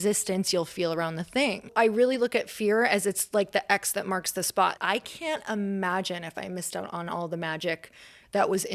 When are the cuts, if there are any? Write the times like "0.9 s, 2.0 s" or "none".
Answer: 1.7 s, 4.8 s